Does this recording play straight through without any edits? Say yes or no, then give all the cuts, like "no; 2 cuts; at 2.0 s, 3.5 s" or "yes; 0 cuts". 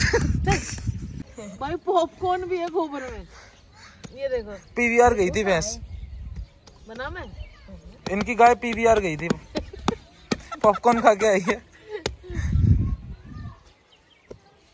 no; 1 cut; at 1.2 s